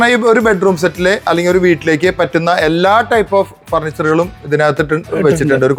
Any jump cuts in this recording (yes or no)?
no